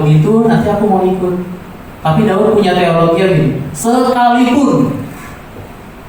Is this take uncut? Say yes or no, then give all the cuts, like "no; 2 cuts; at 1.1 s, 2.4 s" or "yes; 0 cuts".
yes; 0 cuts